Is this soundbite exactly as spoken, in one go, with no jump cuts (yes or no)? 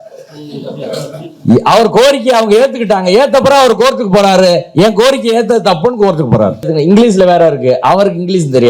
no